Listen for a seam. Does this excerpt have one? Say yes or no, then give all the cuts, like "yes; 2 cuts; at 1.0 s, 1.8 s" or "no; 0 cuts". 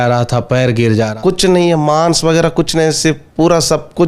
yes; 1 cut; at 1.1 s